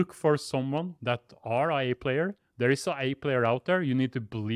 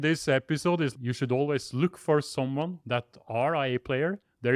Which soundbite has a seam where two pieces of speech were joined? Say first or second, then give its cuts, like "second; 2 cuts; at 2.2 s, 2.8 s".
second; 1 cut; at 0.9 s